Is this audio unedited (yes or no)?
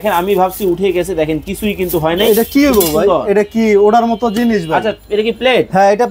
yes